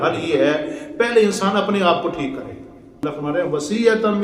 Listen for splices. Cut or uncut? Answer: cut